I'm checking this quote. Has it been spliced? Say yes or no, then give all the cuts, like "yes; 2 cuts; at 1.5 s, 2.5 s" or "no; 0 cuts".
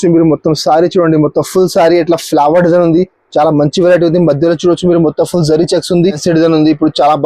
yes; 1 cut; at 6.2 s